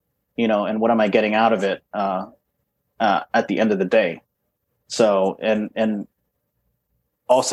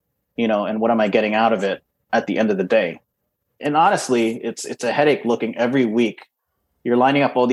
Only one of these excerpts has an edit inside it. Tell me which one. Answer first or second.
second